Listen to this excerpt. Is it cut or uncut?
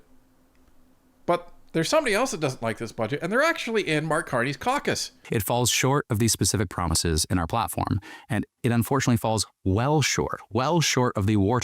cut